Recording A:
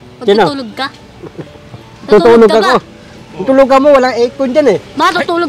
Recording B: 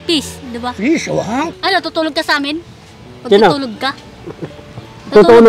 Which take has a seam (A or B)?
B